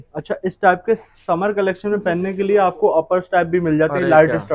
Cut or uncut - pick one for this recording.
uncut